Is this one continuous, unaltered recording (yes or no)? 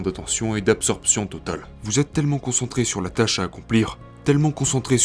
no